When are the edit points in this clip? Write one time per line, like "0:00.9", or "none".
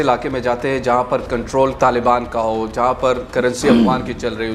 0:01.7